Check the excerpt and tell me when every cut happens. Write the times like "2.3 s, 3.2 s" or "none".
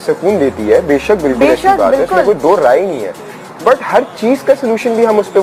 none